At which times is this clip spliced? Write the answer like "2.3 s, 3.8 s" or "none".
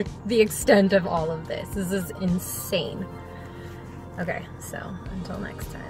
none